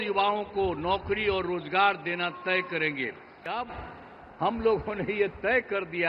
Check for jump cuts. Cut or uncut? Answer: cut